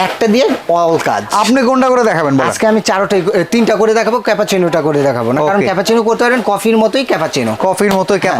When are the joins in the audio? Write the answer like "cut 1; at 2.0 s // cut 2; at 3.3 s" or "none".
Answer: none